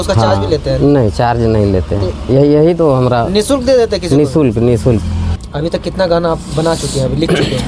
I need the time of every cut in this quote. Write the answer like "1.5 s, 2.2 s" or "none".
5.5 s